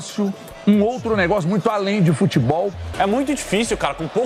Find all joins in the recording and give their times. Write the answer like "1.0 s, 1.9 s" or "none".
2.8 s